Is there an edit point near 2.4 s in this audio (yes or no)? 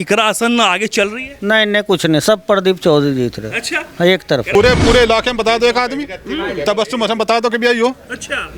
no